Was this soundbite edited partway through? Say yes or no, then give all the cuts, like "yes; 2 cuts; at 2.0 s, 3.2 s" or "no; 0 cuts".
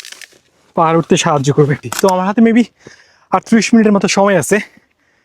yes; 1 cut; at 1.9 s